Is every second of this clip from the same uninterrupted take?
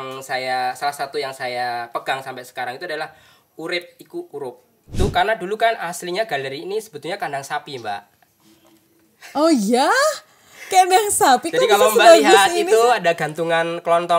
no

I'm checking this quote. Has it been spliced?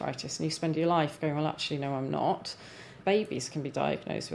yes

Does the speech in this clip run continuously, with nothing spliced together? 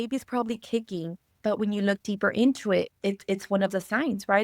no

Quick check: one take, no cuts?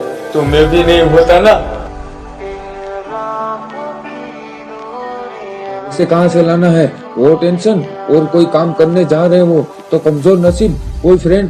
no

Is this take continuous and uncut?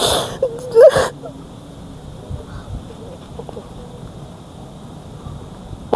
no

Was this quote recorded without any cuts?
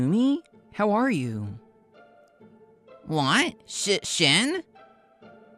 no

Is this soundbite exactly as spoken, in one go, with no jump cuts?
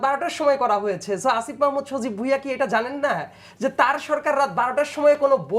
yes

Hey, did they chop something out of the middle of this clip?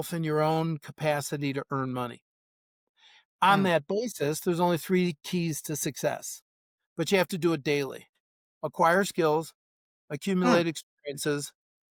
no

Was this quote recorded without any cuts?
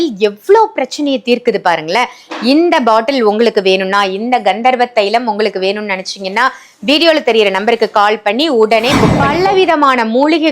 no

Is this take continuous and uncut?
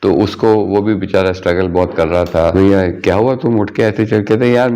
no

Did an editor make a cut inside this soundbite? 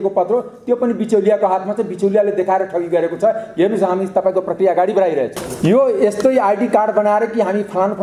yes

